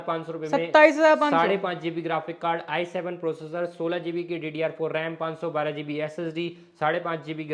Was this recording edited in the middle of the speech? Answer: no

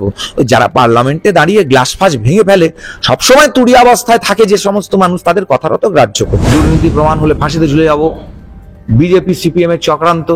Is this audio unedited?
no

